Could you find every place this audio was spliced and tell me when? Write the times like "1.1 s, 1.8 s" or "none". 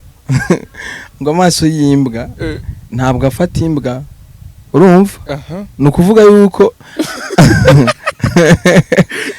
none

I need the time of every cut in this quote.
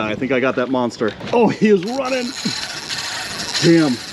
1.2 s

